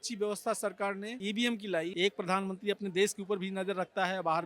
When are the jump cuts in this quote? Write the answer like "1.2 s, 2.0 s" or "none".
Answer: 1.9 s